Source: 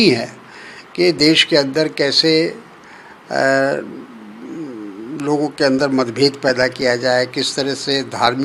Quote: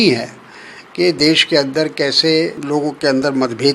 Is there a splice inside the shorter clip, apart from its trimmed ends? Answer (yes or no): yes